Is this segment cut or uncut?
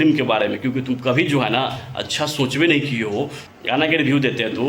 cut